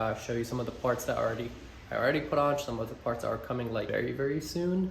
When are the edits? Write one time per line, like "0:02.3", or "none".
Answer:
0:03.9